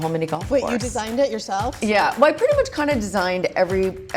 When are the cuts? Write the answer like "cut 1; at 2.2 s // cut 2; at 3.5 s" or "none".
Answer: cut 1; at 1.8 s